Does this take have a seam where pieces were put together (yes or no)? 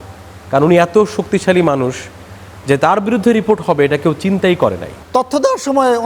yes